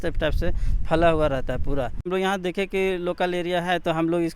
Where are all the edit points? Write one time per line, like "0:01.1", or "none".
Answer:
0:02.1